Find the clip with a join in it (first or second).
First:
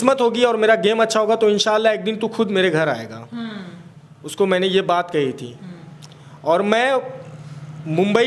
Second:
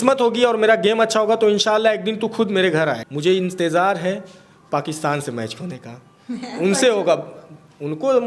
second